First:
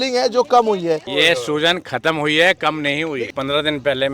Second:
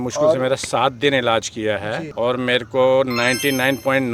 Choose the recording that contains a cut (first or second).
first